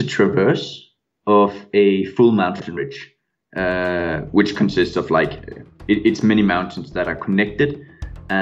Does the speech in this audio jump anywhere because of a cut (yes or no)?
no